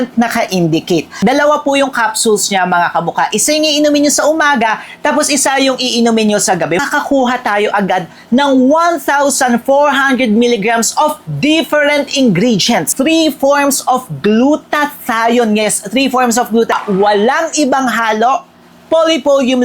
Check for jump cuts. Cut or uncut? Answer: cut